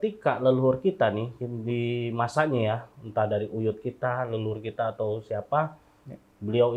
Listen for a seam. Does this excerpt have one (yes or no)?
no